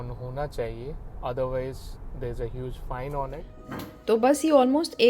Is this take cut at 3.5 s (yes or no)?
yes